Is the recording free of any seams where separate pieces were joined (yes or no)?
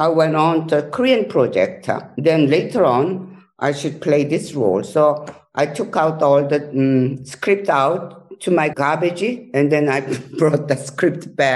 no